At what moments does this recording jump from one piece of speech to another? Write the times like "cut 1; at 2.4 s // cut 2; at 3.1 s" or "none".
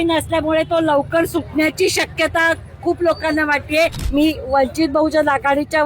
cut 1; at 4.0 s